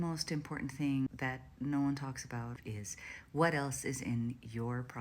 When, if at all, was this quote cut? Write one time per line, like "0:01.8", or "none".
0:01.1
0:02.6